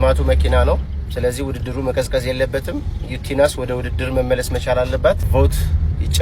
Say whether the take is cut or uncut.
cut